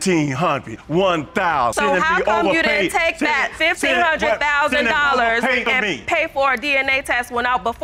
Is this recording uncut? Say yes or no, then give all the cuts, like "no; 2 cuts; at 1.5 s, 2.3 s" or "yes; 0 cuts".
yes; 0 cuts